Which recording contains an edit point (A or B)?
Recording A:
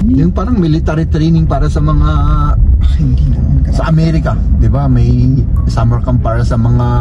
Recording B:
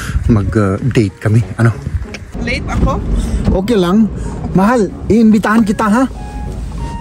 B